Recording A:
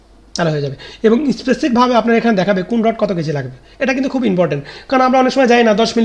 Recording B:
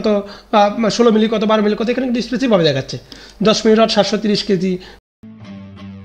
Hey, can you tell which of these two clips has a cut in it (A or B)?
B